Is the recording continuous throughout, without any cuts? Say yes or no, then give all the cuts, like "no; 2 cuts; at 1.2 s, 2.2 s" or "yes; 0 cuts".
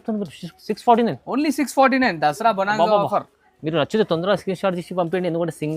yes; 0 cuts